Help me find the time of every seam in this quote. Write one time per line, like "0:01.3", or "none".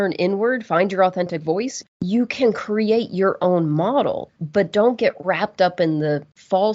0:01.8
0:04.2

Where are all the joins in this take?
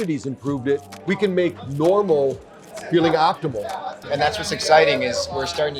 0:01.0
0:04.0

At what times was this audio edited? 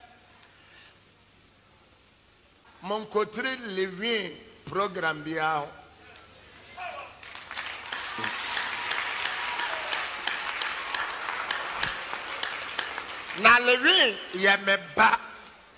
none

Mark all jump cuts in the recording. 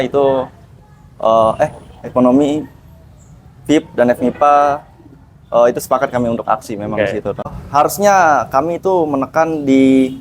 0:07.5

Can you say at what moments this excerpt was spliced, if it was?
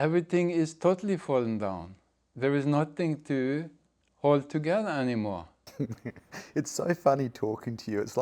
0:05.6

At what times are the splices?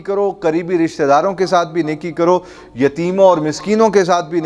none

